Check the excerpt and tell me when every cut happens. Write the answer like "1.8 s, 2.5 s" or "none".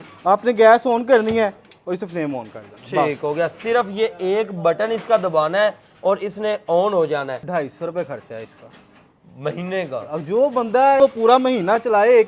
7.4 s, 11.0 s